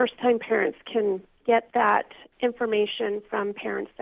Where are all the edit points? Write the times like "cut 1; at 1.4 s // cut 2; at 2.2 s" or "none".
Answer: cut 1; at 1.3 s // cut 2; at 2.2 s